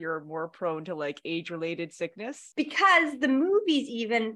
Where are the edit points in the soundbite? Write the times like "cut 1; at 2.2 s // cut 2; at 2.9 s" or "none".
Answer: cut 1; at 2.5 s